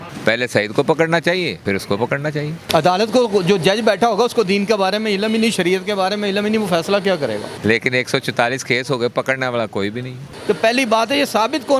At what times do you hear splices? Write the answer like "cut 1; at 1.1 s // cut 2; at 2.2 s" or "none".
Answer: cut 1; at 1.6 s // cut 2; at 2.7 s // cut 3; at 7.5 s // cut 4; at 10.3 s